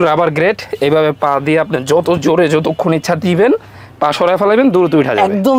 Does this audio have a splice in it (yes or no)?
no